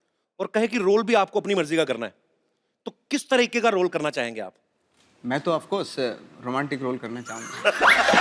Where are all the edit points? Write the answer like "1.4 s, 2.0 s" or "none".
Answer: none